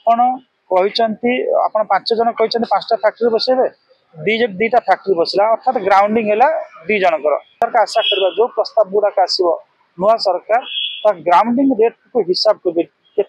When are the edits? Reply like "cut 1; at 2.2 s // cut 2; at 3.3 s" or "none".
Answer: cut 1; at 7.6 s

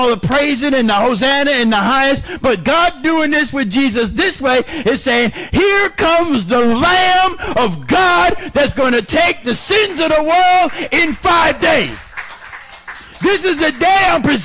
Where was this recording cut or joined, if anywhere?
none

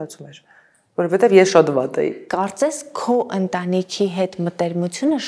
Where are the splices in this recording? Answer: cut 1; at 2.2 s

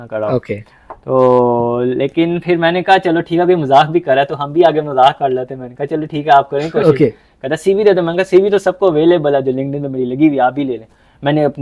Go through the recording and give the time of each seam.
none

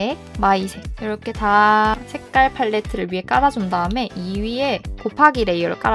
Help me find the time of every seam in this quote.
none

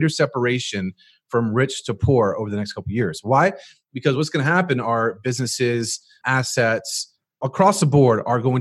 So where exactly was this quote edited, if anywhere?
cut 1; at 6.2 s // cut 2; at 7.4 s

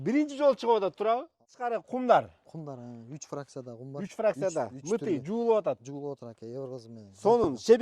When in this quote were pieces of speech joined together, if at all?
cut 1; at 1.5 s

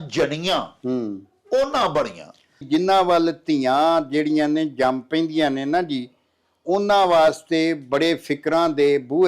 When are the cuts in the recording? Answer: cut 1; at 2.7 s

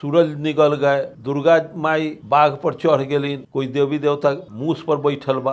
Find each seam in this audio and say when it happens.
cut 1; at 1.1 s // cut 2; at 2.2 s // cut 3; at 3.4 s // cut 4; at 4.5 s

